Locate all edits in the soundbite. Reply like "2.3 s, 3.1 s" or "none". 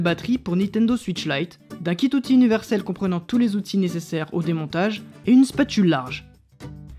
6.1 s